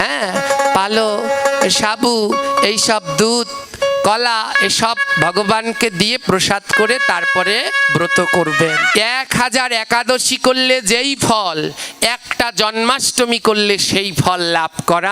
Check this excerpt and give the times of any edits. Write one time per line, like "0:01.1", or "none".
0:08.8

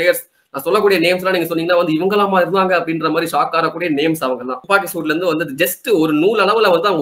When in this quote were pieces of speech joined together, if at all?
0:04.5

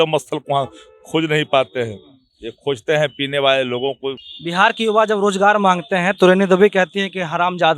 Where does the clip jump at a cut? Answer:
0:04.3

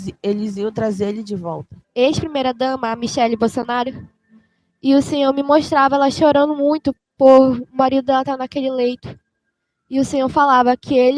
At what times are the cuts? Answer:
0:01.7

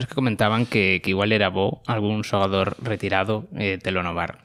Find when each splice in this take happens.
none

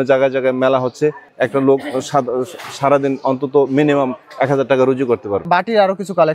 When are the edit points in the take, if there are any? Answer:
0:01.3
0:05.5

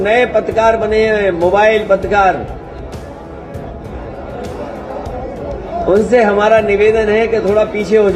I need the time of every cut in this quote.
none

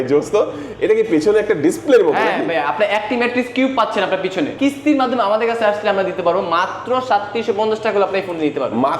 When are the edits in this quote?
0:04.5

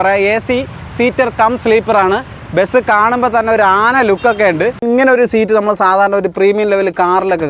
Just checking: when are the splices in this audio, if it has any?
0:04.8

